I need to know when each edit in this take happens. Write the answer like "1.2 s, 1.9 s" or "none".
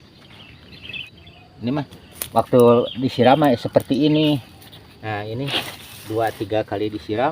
1.0 s